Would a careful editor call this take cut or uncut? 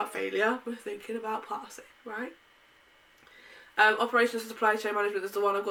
uncut